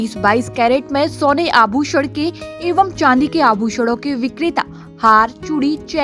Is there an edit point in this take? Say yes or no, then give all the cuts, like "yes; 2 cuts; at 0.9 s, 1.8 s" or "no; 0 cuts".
no; 0 cuts